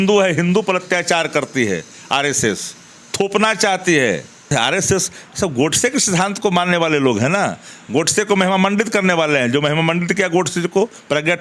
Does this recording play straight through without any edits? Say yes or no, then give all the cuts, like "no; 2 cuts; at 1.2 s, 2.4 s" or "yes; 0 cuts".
no; 1 cut; at 4.5 s